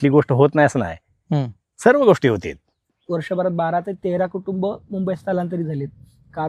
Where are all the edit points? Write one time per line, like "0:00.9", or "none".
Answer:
0:02.9